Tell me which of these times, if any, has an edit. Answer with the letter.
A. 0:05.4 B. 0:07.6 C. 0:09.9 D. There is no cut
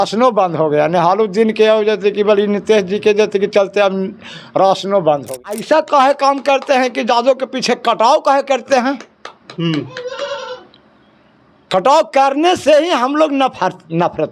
A